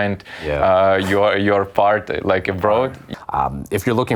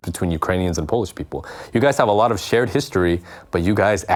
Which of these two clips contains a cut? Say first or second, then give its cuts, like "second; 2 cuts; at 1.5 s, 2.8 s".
first; 1 cut; at 3.0 s